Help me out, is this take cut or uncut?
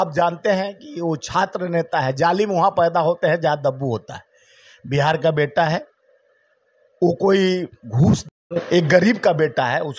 uncut